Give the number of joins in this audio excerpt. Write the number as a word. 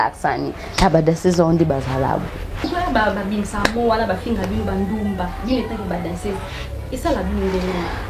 one